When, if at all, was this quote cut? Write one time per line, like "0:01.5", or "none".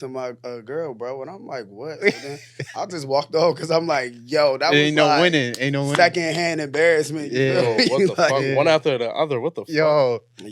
none